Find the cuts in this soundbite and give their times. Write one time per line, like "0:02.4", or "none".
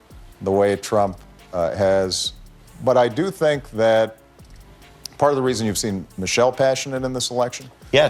0:02.7